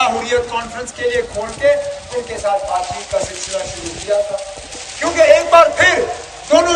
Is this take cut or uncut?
uncut